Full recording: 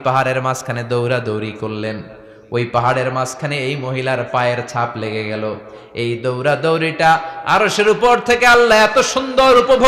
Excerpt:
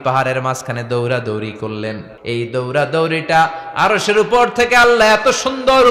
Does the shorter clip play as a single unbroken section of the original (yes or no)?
no